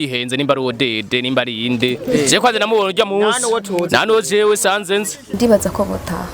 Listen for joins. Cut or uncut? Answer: cut